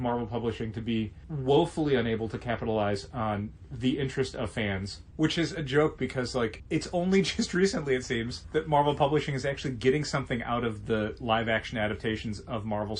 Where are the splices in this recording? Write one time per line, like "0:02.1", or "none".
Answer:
0:05.0
0:06.6
0:08.3